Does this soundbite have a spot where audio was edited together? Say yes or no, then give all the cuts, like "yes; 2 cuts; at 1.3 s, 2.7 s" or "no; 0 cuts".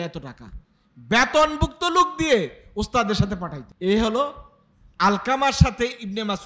no; 0 cuts